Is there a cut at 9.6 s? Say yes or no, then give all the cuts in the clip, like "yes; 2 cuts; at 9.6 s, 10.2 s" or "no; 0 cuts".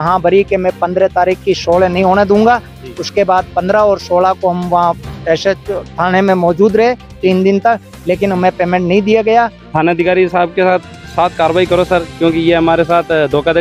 yes; 1 cut; at 9.6 s